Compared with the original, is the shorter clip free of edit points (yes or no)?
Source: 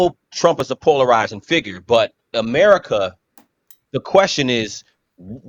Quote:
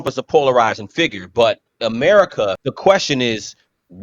no